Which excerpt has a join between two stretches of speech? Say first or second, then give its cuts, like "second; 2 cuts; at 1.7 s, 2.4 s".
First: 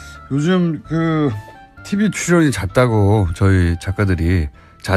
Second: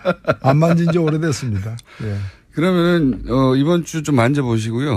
second; 1 cut; at 3.2 s